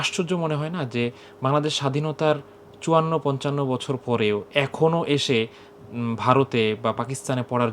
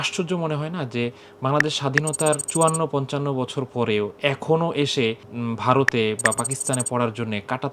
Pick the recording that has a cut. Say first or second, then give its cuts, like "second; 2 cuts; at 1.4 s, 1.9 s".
second; 2 cuts; at 2.5 s, 5.3 s